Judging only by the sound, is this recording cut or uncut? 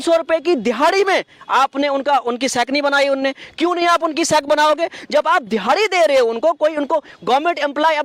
uncut